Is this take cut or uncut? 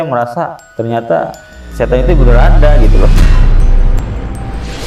uncut